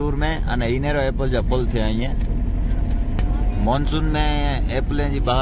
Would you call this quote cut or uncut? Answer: uncut